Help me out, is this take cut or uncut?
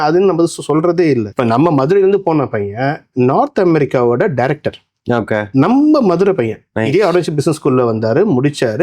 cut